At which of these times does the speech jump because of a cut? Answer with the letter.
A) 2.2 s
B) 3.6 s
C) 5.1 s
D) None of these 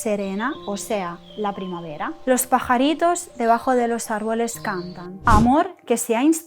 C